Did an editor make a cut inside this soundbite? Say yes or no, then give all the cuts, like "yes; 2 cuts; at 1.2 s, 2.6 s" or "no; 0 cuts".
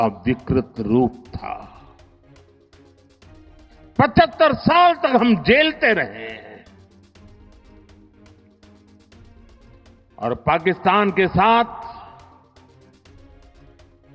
no; 0 cuts